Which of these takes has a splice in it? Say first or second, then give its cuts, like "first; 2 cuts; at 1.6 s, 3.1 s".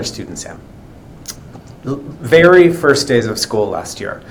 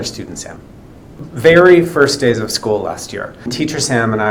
second; 2 cuts; at 1.2 s, 3.5 s